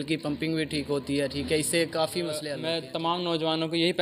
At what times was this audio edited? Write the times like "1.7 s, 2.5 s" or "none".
2.6 s